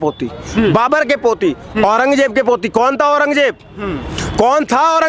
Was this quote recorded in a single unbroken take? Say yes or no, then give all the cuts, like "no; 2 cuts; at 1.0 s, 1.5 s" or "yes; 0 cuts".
yes; 0 cuts